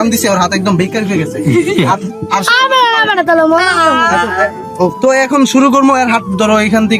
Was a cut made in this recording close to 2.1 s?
no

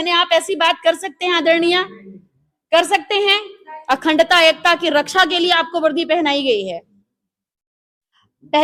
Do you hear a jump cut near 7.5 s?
no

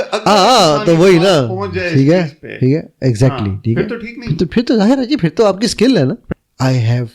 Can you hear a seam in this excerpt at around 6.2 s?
yes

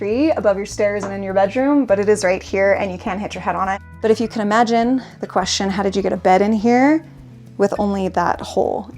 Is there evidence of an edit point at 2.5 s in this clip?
no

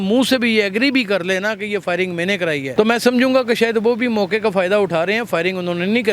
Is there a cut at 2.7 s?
yes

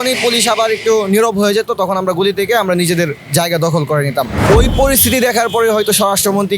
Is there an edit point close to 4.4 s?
yes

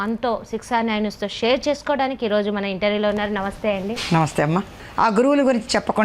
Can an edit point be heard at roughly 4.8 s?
yes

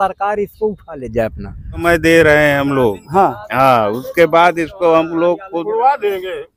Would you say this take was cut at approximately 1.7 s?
yes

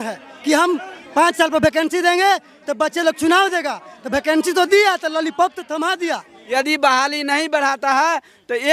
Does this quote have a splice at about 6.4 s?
yes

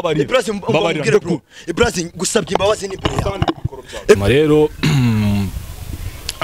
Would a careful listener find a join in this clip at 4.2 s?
yes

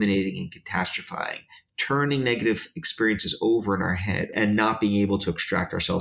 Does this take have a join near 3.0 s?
no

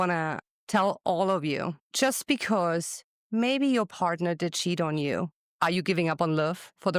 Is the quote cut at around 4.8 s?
no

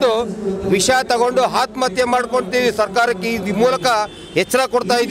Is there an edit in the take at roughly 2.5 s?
no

